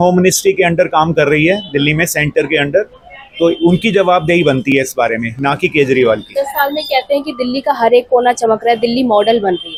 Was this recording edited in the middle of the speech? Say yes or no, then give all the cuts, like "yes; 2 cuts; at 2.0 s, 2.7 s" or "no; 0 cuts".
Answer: no; 0 cuts